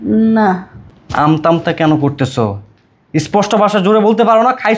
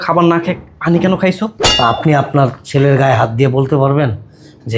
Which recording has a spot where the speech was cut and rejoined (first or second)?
second